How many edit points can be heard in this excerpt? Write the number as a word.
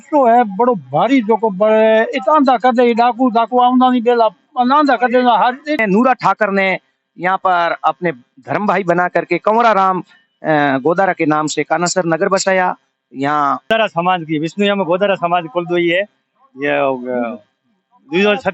two